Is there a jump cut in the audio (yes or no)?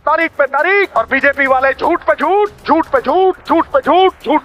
yes